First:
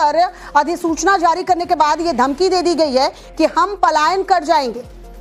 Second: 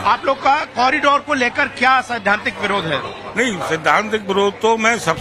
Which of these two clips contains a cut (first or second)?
first